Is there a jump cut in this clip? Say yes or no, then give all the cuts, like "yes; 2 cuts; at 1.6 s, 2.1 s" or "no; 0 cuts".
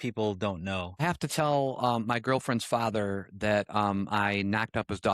yes; 1 cut; at 1.0 s